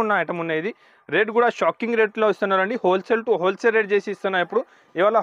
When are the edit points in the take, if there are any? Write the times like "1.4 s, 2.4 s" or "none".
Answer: none